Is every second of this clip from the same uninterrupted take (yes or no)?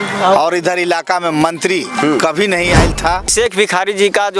no